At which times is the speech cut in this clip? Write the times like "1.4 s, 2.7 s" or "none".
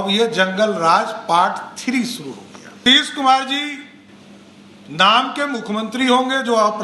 2.8 s